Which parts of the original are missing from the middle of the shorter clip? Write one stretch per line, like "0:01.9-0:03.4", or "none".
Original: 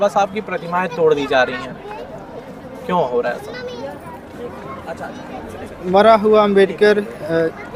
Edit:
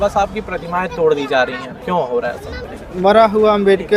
0:01.7-0:02.7
0:03.6-0:05.5

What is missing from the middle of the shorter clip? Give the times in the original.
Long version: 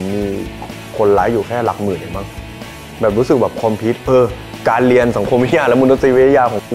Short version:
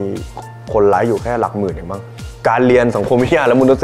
0:02.5-0:04.5

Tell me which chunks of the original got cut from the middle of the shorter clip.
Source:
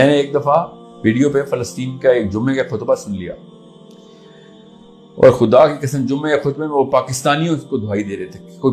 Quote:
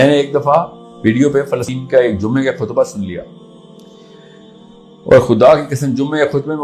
0:01.7-0:01.9

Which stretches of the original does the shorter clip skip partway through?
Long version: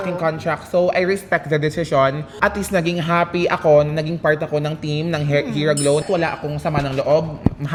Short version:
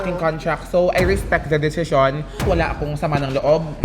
0:02.4-0:06.0

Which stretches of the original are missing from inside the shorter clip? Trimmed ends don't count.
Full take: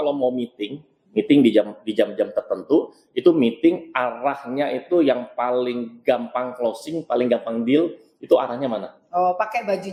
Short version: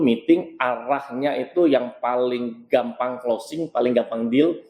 none

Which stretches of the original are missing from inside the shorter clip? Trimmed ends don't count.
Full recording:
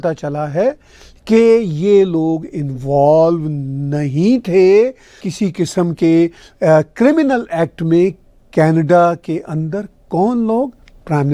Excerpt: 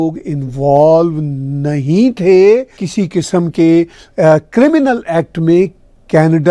0:05.1-0:05.2

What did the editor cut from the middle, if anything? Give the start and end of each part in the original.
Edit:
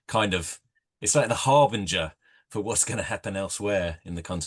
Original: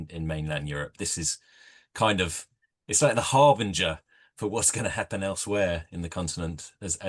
none

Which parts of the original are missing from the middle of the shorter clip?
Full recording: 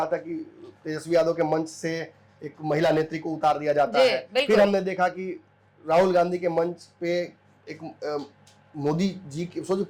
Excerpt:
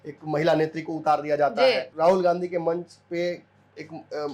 0:04.2-0:05.8

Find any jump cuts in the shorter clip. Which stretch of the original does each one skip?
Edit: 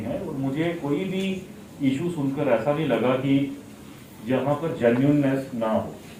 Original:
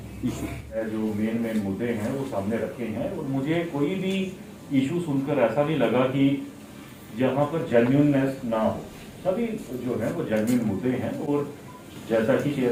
none

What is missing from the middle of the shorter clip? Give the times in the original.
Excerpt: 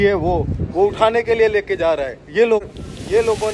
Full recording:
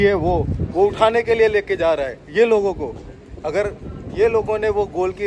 0:02.6-0:03.7

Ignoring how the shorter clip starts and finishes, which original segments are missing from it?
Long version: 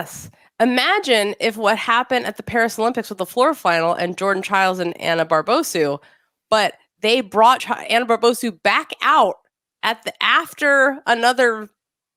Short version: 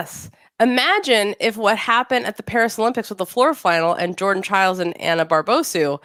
none

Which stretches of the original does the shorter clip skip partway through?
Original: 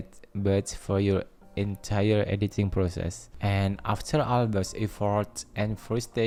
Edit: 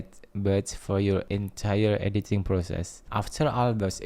0:01.3-0:01.6
0:03.3-0:03.8

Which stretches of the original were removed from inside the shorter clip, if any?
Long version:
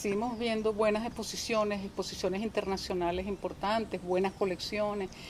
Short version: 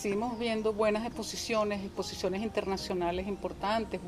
none

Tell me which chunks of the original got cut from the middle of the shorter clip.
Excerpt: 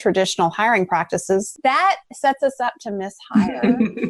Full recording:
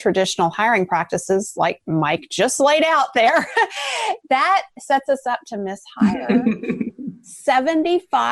0:01.5-0:04.2

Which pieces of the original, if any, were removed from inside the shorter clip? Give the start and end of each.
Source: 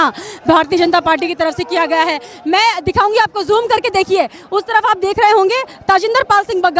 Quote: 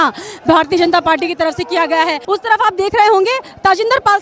0:02.2-0:04.4

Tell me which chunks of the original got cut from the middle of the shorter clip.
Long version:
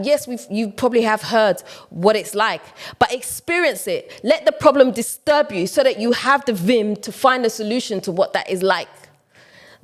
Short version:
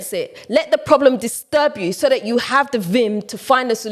none

